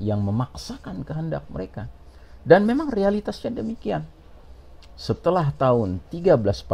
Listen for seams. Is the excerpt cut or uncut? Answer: uncut